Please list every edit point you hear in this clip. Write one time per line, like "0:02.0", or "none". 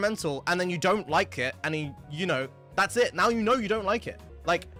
none

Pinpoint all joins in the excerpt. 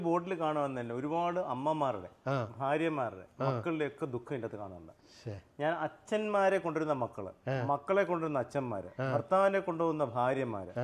none

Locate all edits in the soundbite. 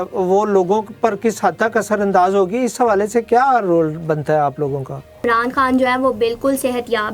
0:05.2

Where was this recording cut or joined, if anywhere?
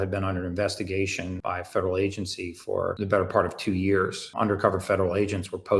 0:01.3
0:03.0
0:04.3

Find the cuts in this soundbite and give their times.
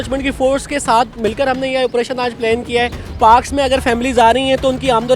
0:03.0

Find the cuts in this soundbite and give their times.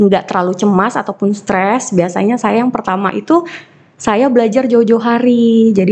none

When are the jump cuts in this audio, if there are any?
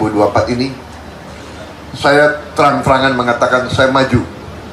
none

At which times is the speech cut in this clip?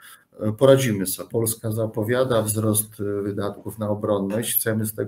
0:01.2

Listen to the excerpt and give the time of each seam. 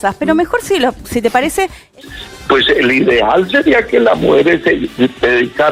none

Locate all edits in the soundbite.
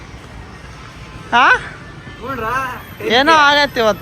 none

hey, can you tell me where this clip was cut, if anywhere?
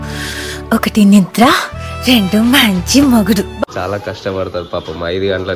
0:03.7

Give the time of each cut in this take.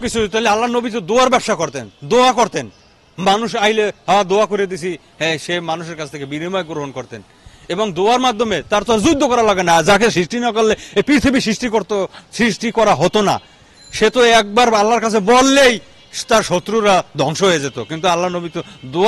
none

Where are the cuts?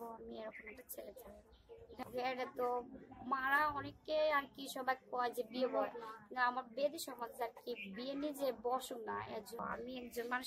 0:02.0
0:09.6

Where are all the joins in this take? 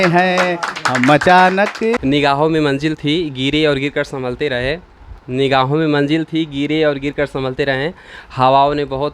0:02.0

